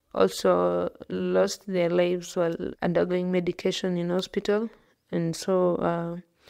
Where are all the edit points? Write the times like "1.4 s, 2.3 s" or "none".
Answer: none